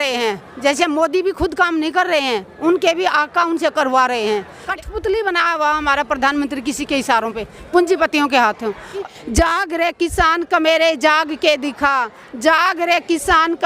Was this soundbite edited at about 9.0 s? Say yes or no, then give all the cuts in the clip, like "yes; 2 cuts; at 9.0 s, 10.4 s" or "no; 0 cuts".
yes; 2 cuts; at 4.6 s, 9.0 s